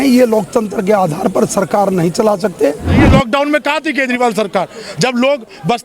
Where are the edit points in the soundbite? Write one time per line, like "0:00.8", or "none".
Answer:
0:03.0